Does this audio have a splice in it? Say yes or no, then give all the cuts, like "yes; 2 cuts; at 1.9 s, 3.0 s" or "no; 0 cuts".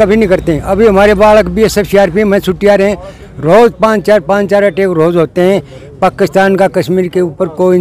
no; 0 cuts